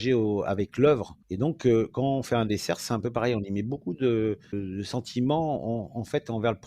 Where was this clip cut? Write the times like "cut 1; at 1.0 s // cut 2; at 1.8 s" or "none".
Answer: cut 1; at 1.2 s // cut 2; at 4.6 s